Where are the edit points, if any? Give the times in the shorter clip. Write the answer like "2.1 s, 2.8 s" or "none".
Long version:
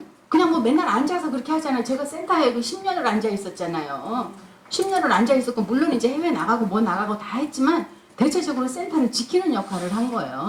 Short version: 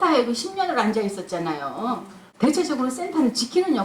2.2 s